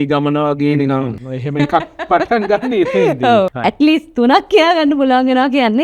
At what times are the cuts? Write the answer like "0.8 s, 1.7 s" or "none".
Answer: 1.3 s, 3.5 s